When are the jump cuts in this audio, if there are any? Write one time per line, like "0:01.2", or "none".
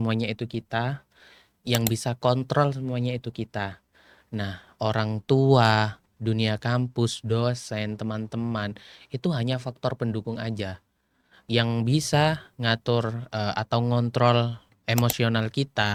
none